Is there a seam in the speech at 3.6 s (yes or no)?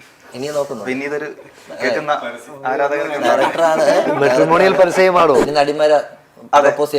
no